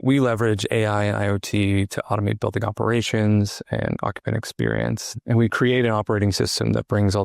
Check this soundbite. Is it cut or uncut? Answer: cut